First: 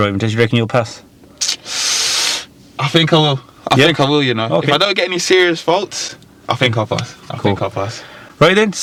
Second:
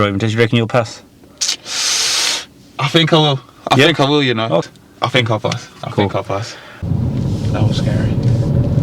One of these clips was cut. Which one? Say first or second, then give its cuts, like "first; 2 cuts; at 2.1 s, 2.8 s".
second; 2 cuts; at 4.6 s, 6.8 s